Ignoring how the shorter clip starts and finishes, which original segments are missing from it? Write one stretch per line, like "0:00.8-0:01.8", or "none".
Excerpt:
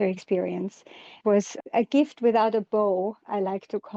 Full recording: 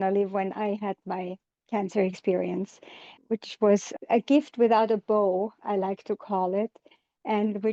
0:03.1-0:03.5